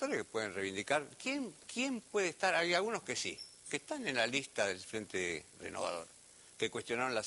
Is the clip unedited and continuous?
yes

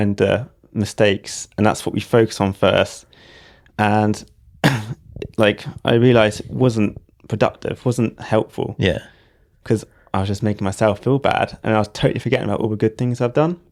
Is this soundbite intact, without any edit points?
yes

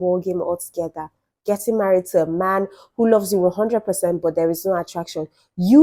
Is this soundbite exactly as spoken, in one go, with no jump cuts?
yes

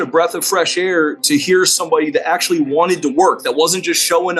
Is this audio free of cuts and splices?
yes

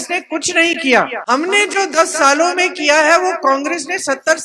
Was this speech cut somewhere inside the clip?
yes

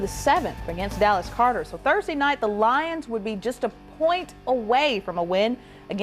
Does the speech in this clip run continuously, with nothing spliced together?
yes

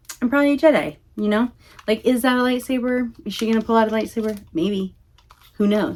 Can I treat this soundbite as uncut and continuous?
yes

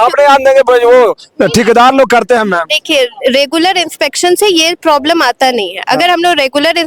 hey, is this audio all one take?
yes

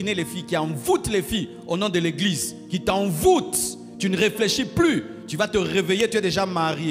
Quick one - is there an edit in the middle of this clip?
no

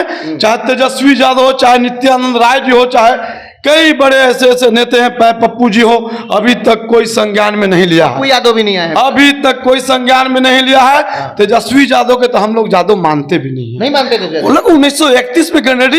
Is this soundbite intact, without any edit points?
yes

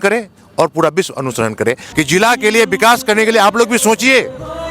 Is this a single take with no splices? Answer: no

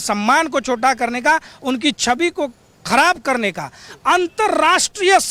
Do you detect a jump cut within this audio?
no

